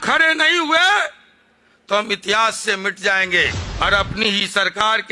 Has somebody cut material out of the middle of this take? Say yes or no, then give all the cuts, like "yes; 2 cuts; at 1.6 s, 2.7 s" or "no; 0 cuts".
yes; 1 cut; at 3.6 s